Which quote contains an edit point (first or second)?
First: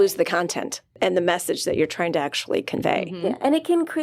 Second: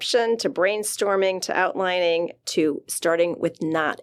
first